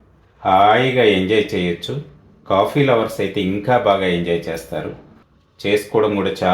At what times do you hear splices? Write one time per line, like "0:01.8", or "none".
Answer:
0:05.0